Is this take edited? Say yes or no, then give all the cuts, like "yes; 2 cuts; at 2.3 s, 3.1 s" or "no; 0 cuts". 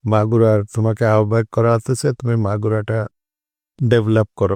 no; 0 cuts